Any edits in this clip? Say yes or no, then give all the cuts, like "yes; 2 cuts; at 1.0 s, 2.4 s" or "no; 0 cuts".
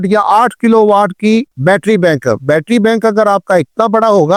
no; 0 cuts